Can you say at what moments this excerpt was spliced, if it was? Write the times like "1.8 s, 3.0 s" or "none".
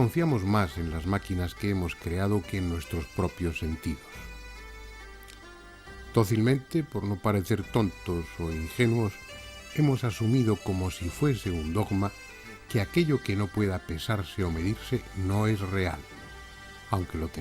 2.0 s